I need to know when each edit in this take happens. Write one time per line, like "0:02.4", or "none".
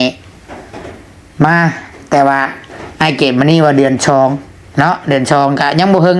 none